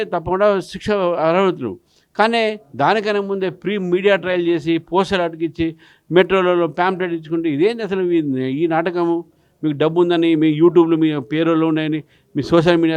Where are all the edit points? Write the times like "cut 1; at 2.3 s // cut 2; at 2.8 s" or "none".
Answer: none